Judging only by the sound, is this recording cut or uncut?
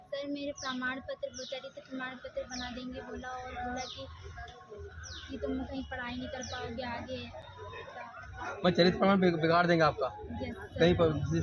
uncut